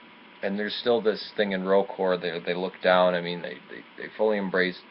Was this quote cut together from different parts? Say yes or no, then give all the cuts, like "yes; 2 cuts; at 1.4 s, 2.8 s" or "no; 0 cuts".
no; 0 cuts